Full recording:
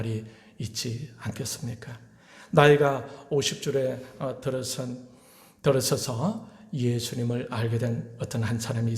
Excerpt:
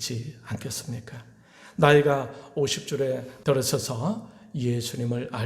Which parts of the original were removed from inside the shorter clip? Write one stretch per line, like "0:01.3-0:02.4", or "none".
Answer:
0:04.1-0:05.5